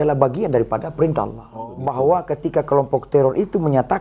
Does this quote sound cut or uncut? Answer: cut